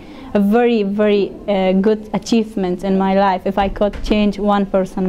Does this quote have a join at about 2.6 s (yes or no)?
no